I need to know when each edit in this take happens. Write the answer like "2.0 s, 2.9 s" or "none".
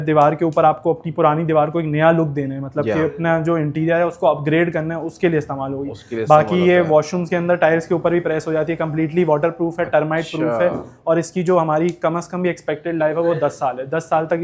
none